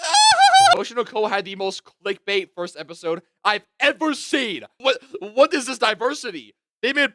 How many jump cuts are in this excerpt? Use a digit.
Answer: 2